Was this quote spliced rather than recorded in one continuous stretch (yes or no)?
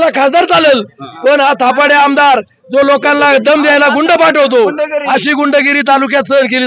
no